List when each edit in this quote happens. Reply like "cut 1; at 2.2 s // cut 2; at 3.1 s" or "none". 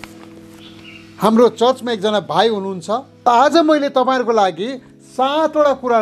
cut 1; at 3.1 s